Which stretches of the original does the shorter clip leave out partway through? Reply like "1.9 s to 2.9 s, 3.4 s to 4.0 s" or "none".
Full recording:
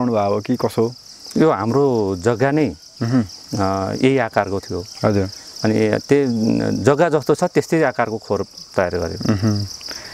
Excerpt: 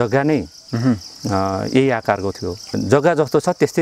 5.0 s to 6.6 s